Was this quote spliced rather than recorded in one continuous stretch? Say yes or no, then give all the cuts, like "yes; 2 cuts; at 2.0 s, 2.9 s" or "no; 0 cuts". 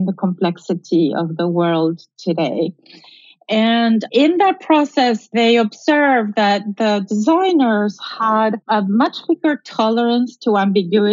yes; 3 cuts; at 4.1 s, 5.3 s, 8.6 s